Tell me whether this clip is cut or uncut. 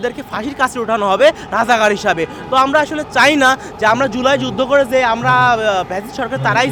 uncut